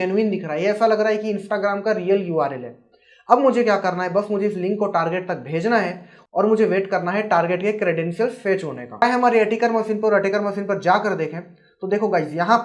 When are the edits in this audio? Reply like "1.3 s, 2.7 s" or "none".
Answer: 9.0 s